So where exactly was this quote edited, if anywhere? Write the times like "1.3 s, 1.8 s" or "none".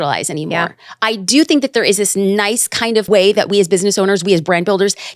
3.1 s